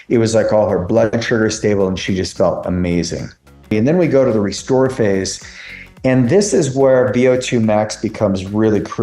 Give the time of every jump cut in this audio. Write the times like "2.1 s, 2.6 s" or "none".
3.7 s